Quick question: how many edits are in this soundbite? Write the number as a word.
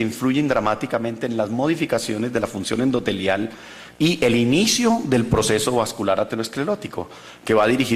one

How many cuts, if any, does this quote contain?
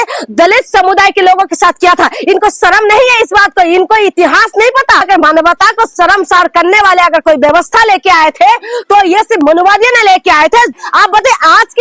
two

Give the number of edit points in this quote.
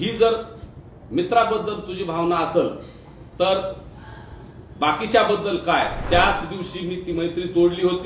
one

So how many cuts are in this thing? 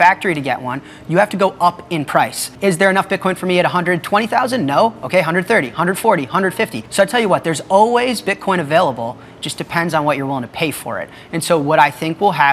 two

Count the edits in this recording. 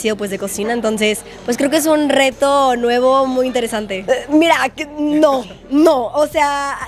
one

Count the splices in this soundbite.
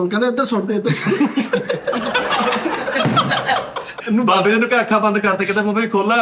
one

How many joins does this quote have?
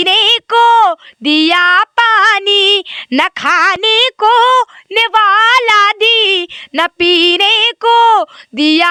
zero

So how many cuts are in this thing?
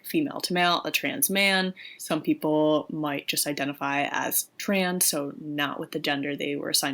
one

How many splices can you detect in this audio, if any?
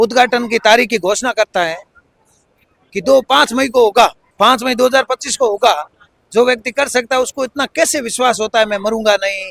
zero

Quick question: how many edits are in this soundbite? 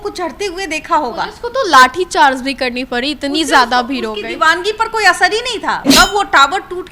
one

